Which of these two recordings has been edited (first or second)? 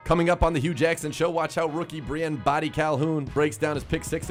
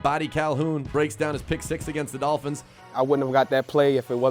second